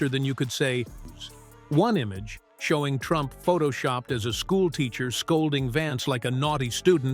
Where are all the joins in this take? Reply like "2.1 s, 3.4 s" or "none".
1.1 s